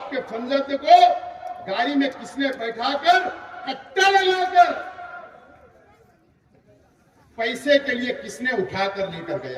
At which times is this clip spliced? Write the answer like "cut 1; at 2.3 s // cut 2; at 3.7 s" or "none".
none